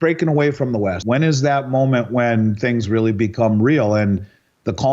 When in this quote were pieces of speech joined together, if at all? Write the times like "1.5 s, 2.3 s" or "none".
1.0 s